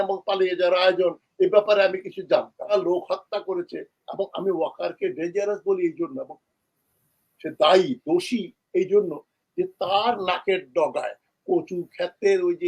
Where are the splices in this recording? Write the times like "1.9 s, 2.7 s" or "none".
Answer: 2.7 s